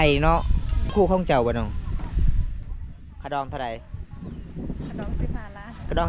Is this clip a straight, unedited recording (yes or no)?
no